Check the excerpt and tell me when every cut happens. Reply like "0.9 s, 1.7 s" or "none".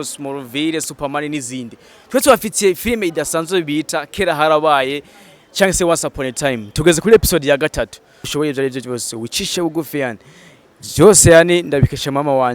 8.3 s

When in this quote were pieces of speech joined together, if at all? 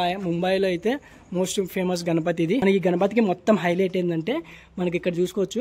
2.6 s

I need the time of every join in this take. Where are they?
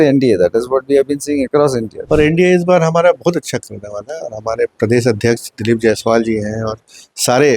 1.9 s

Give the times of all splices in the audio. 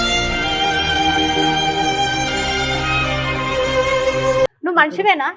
4.5 s

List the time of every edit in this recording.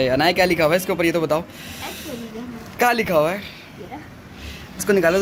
none

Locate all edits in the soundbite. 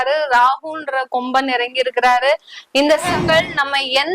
3.0 s

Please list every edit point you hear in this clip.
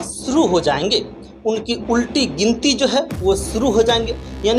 none

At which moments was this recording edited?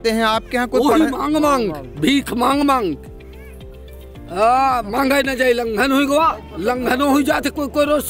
6.5 s

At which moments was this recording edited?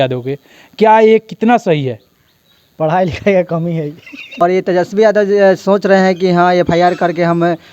4.4 s

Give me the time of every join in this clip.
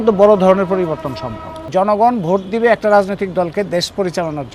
1.6 s

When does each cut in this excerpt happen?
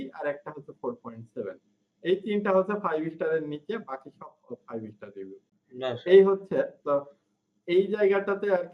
none

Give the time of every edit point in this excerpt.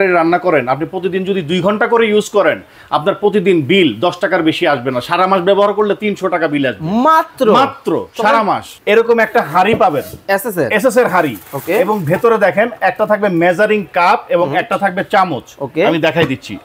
8.7 s

